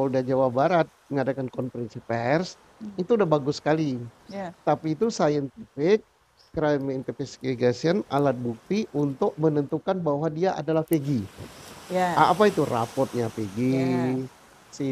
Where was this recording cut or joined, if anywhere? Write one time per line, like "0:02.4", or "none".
none